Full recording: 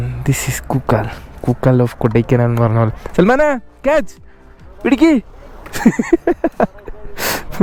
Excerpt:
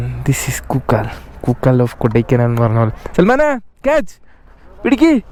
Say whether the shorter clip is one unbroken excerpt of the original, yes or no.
yes